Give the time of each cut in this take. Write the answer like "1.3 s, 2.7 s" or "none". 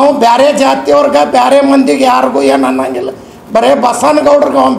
none